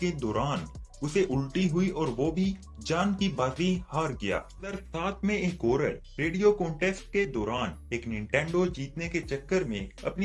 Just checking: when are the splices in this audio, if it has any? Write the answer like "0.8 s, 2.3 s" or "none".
4.7 s